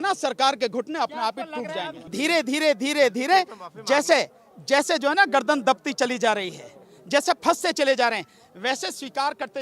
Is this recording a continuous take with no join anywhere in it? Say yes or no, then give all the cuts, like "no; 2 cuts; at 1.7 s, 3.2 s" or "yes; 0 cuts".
no; 1 cut; at 2.1 s